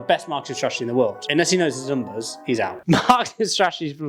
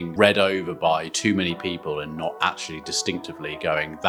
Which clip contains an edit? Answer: first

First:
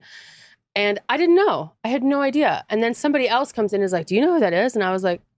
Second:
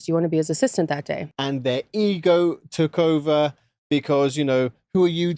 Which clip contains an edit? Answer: second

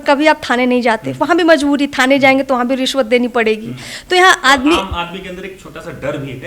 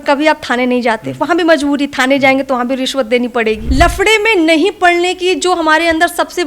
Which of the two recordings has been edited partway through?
second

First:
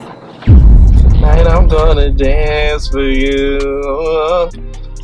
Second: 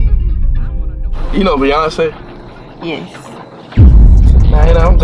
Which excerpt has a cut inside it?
second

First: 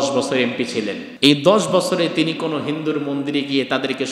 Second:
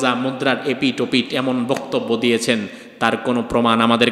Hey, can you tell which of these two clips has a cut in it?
first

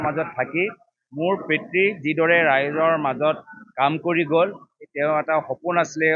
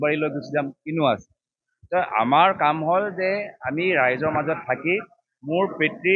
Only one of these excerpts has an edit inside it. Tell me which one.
second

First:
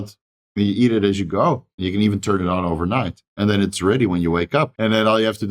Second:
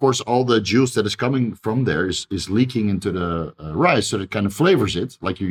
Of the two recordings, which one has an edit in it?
first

